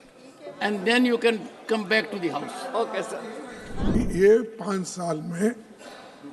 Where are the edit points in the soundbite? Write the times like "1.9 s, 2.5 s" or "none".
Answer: 3.9 s